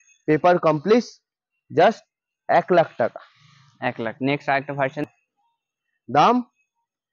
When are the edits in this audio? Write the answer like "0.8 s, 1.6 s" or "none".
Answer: 5.0 s